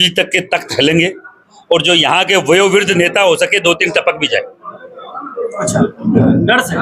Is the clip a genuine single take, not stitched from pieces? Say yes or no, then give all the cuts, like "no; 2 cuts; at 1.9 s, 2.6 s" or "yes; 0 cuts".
yes; 0 cuts